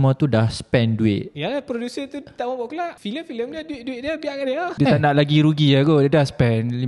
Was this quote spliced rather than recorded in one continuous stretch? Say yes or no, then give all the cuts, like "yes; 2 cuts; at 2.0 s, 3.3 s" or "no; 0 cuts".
yes; 3 cuts; at 1.3 s, 3.0 s, 4.7 s